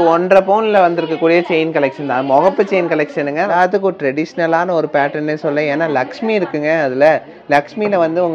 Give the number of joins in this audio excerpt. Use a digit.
1